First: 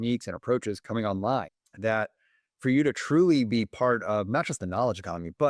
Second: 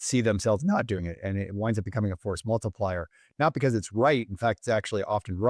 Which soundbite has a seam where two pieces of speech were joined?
first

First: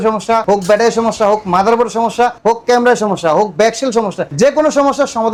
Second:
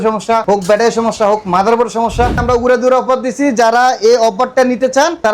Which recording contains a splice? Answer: second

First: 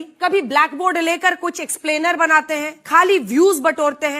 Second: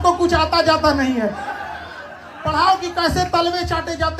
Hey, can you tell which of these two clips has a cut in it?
second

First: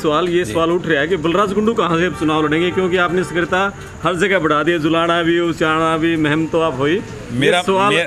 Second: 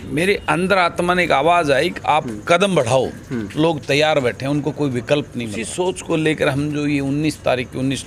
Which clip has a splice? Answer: second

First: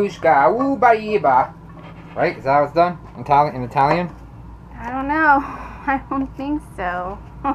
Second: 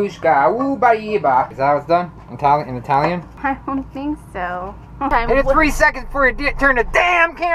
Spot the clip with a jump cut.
second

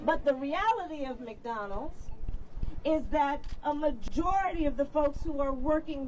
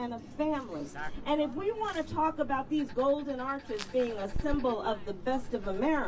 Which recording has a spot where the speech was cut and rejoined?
second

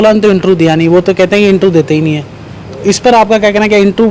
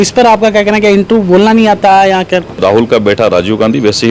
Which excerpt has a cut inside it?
second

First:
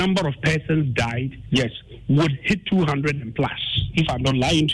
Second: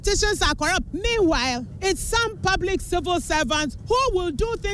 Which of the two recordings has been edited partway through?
second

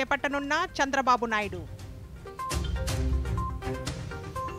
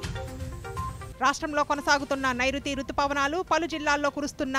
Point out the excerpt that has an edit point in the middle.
second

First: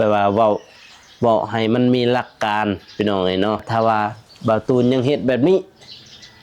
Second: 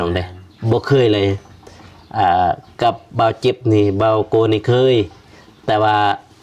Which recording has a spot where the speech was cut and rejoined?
first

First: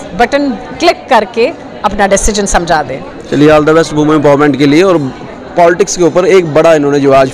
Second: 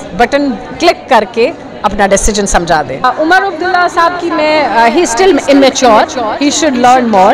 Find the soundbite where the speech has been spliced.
second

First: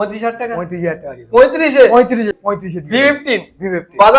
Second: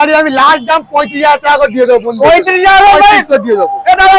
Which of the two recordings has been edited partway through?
first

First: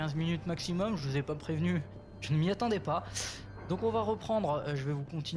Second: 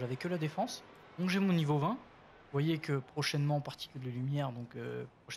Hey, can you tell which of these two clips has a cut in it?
second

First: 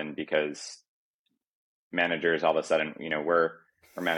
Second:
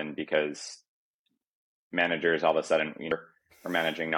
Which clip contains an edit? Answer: second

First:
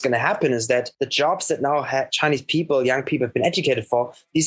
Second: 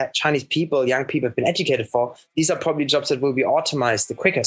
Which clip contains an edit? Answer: first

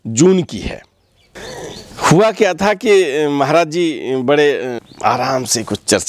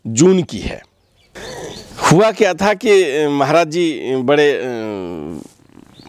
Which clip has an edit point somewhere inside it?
first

